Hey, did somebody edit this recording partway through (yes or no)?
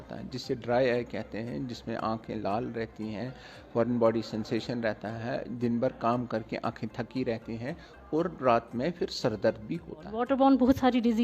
yes